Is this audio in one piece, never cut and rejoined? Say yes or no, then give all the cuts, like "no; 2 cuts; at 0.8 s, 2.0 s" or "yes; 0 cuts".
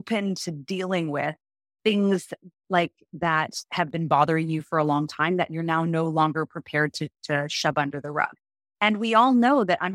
yes; 0 cuts